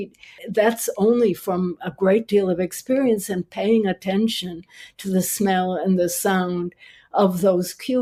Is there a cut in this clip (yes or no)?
no